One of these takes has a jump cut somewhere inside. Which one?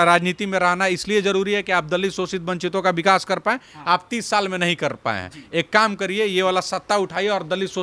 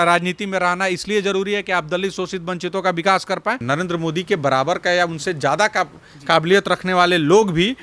second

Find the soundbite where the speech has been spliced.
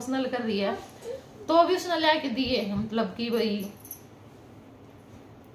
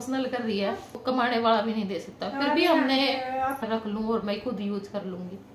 second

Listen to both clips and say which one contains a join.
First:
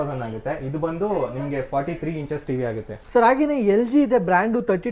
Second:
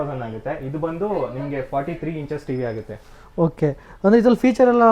first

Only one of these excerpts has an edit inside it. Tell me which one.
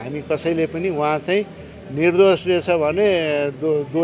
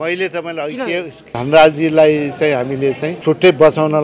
second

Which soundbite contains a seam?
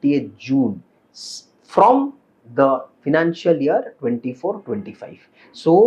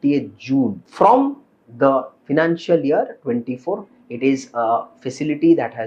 second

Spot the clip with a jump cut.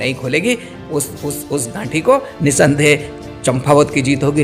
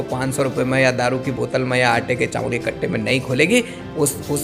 first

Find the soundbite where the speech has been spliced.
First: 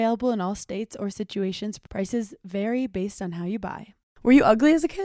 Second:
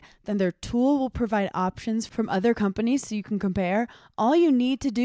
first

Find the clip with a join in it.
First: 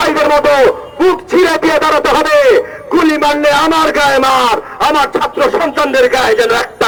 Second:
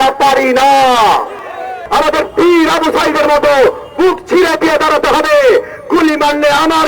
second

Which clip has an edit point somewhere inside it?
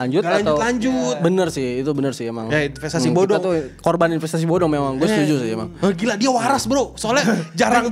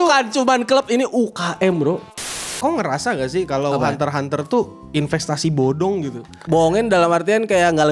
second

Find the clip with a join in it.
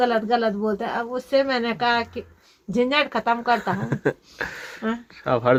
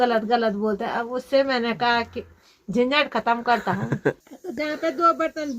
second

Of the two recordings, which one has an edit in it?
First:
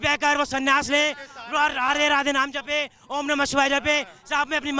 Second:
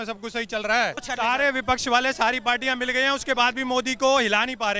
second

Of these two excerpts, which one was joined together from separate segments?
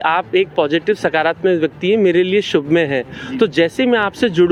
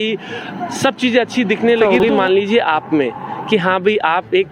second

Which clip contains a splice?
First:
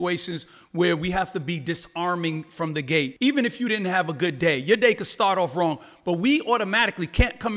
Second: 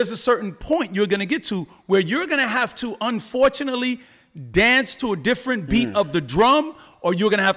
first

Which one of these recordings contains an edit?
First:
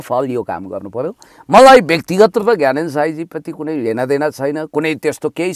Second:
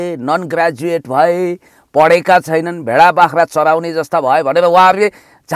first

